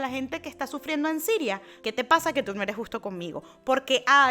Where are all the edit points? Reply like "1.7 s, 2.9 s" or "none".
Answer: 1.7 s